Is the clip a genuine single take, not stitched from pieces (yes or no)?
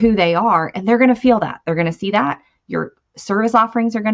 yes